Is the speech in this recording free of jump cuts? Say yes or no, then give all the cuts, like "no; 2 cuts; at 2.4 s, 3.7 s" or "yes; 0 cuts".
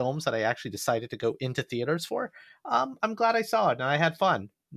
yes; 0 cuts